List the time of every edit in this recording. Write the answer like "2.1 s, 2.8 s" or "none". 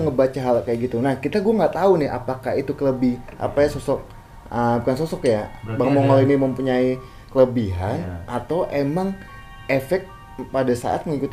none